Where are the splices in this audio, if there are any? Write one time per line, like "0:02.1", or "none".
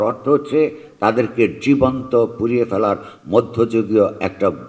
none

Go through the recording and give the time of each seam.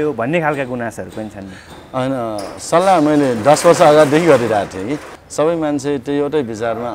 none

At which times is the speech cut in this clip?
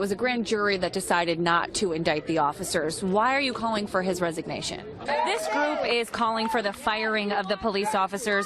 0:04.9

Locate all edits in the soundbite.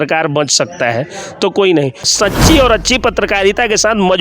0:02.1

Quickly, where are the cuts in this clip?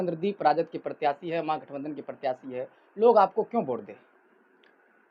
none

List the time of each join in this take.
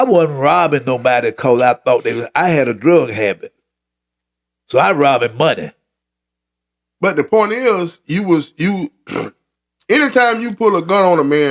none

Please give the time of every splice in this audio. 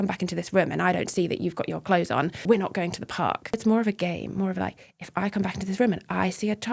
0:02.4
0:03.5

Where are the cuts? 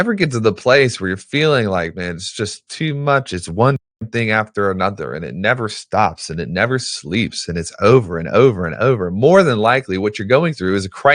none

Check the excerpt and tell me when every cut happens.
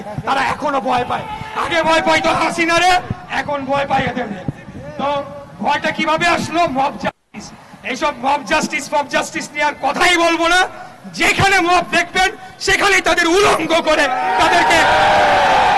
none

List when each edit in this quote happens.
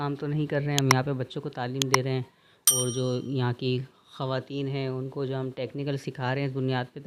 none

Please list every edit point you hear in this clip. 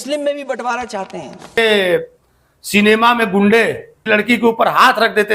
0:01.6
0:03.9

